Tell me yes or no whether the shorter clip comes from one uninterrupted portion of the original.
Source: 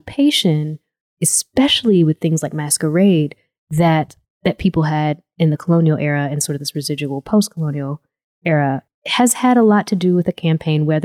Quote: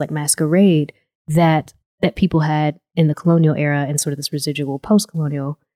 yes